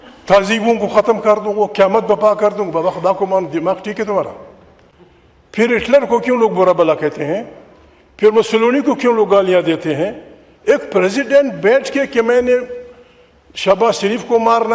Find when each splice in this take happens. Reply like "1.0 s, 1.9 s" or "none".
none